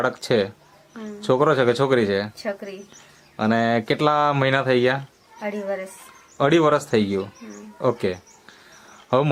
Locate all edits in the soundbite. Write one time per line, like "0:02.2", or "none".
none